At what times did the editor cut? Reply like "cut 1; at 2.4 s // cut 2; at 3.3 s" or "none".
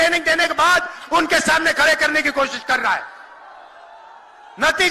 none